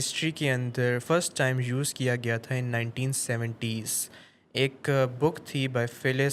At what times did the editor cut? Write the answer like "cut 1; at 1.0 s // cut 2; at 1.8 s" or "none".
cut 1; at 1.0 s

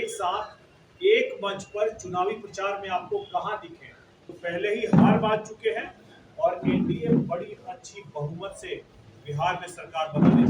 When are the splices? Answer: cut 1; at 4.3 s

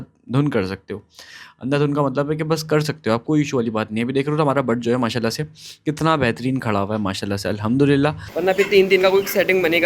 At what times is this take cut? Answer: cut 1; at 8.3 s

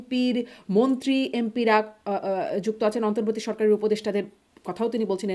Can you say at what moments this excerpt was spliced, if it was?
none

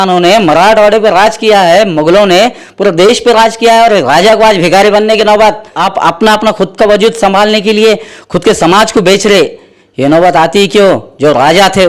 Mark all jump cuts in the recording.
cut 1; at 5.8 s

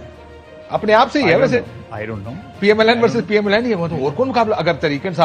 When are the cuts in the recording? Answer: none

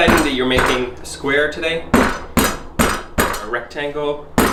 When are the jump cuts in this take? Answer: none

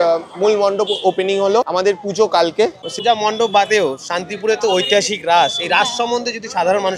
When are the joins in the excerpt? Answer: cut 1; at 2.9 s

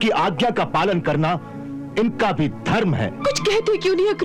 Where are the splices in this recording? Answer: cut 1; at 3.2 s

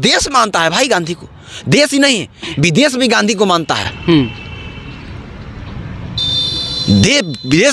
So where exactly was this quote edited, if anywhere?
none

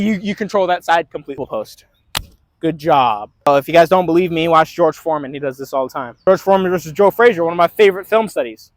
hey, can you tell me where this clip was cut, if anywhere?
cut 1; at 1.4 s // cut 2; at 3.5 s // cut 3; at 6.3 s

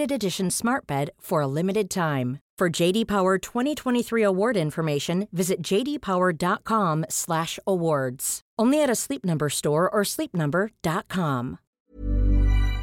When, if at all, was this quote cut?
cut 1; at 11.7 s

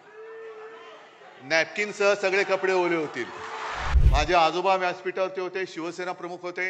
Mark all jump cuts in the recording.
cut 1; at 3.9 s

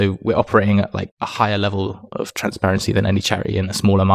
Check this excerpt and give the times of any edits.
cut 1; at 1.1 s

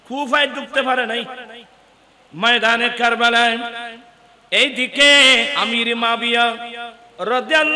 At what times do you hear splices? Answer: cut 1; at 5.6 s

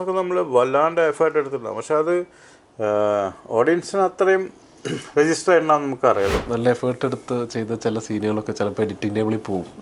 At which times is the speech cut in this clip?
cut 1; at 6.3 s

